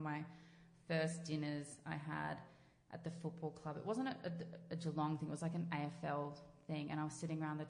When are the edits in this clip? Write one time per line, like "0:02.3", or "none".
none